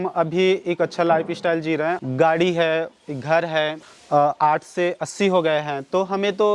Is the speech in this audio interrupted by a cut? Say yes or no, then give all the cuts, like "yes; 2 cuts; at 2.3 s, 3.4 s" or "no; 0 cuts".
yes; 2 cuts; at 2.0 s, 3.9 s